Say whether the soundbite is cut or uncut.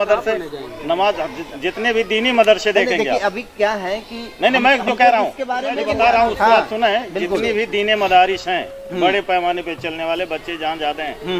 cut